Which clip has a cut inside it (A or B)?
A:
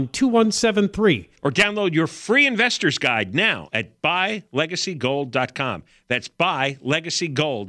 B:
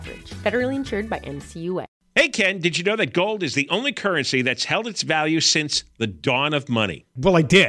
B